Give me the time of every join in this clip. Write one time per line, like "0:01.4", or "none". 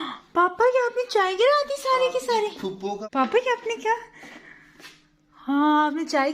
none